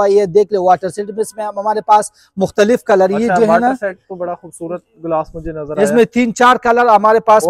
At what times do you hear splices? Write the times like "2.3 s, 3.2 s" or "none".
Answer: none

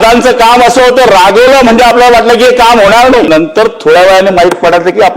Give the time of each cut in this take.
3.3 s

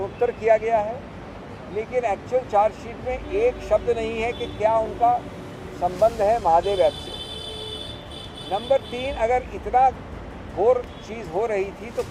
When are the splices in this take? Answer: none

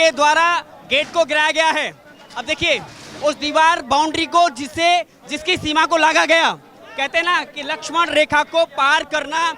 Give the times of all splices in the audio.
none

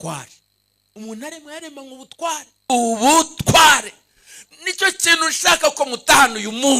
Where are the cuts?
2.7 s

